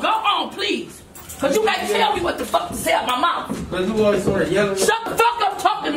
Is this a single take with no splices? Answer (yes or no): yes